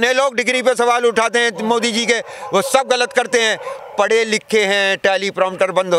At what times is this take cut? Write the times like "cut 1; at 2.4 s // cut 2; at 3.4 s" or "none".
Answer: none